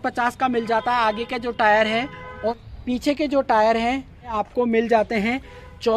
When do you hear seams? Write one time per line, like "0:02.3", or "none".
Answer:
0:02.5
0:04.4

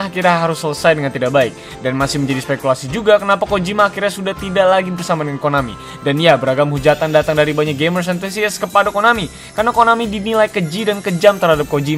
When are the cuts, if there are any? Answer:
none

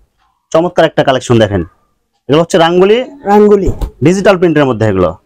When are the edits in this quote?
none

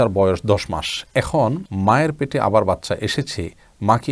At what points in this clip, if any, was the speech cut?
0:01.7

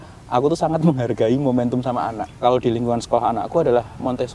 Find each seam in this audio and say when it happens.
0:02.4

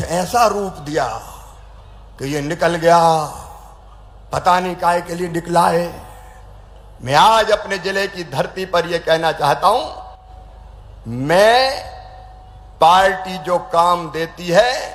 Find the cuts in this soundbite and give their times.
none

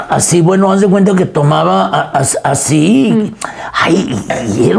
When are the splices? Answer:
none

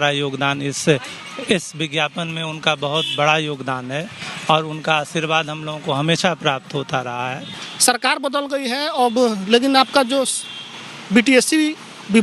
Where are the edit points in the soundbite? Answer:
none

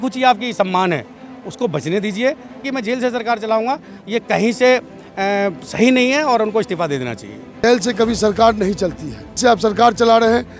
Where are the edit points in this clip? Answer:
0:02.7
0:07.6
0:09.4

